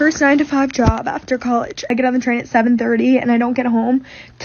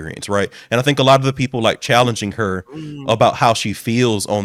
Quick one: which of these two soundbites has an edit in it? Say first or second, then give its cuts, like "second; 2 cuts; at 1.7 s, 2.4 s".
first; 1 cut; at 1.9 s